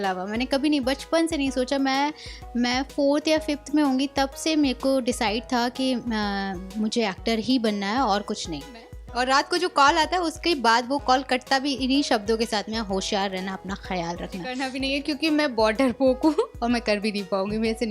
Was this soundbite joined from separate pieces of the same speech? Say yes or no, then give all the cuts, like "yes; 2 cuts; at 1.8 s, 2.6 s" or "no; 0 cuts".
yes; 2 cuts; at 9.0 s, 14.6 s